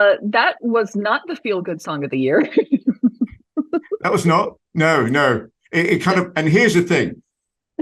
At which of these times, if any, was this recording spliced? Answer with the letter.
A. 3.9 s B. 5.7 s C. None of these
C